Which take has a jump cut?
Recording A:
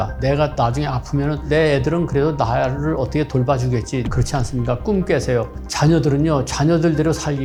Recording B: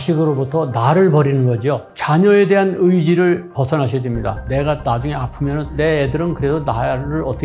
B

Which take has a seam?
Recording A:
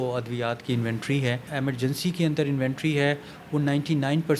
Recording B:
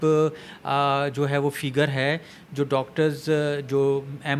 A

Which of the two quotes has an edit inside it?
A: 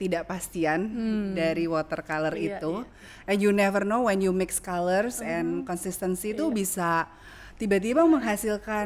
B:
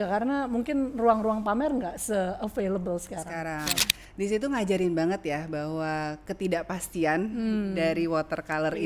B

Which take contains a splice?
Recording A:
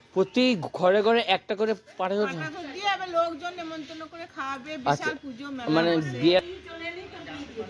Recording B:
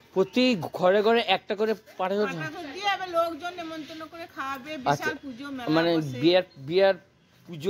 A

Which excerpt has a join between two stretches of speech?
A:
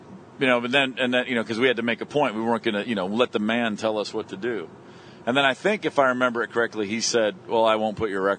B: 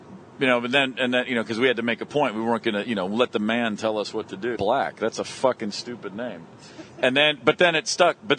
A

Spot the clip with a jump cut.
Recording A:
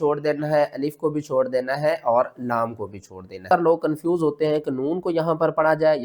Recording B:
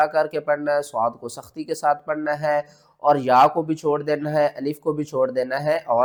A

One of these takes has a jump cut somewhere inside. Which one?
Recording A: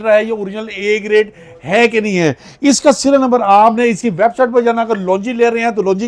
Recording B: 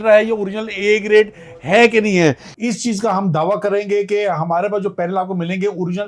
B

